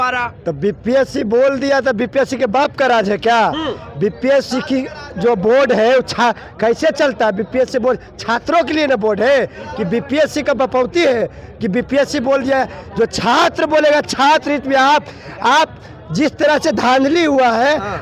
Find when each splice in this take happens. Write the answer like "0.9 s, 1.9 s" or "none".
none